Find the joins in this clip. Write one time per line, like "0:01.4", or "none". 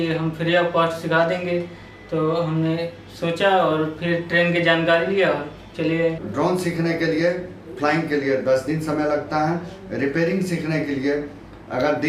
0:06.2